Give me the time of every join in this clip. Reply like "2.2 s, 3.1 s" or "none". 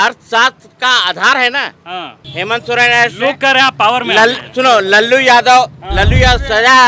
2.2 s

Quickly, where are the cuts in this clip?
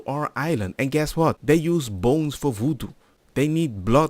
1.4 s

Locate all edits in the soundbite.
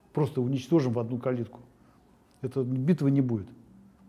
none

